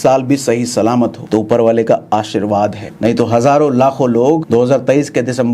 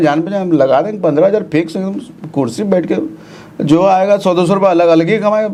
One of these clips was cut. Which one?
first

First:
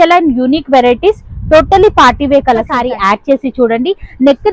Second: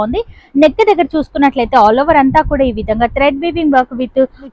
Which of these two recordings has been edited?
first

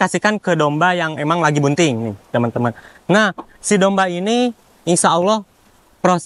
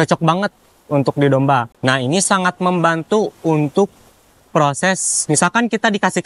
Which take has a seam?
second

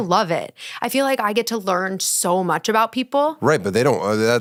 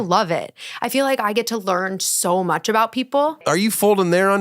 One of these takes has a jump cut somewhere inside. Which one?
second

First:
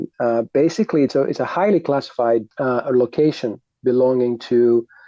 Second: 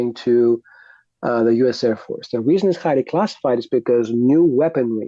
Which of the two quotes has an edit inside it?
first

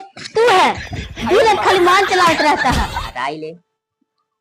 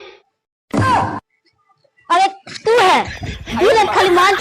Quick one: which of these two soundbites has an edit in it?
first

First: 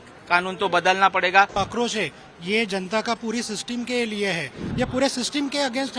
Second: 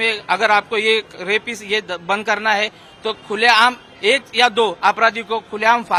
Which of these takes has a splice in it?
first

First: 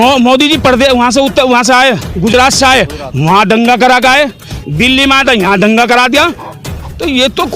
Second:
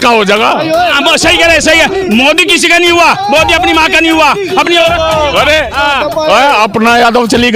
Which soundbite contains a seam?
second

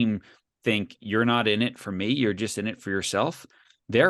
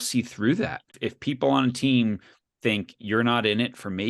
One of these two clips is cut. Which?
second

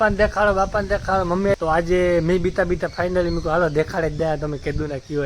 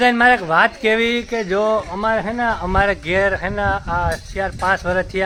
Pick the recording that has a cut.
first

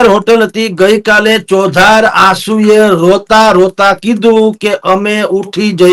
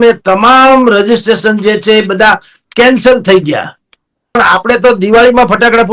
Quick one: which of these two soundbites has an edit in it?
second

